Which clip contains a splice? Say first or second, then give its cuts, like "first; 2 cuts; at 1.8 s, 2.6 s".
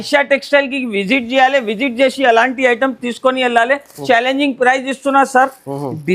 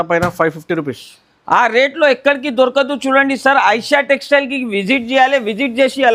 first; 1 cut; at 4.0 s